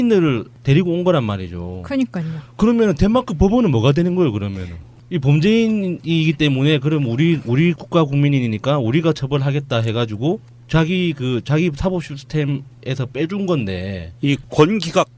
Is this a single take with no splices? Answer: yes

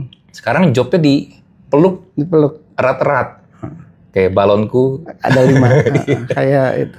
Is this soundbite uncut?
yes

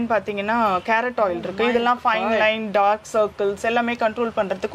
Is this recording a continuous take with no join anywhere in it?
yes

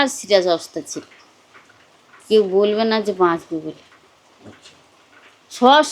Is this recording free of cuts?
yes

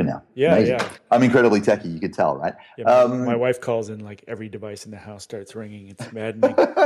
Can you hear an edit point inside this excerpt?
yes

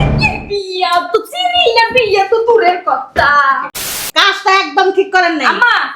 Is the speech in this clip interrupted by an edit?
yes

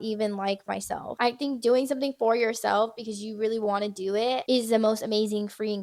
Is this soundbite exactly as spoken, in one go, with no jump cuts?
no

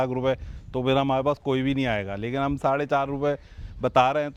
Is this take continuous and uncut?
yes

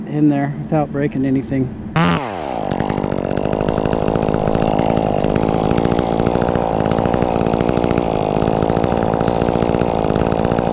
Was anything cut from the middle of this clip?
yes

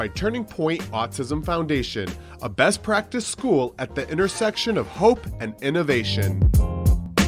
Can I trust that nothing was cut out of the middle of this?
no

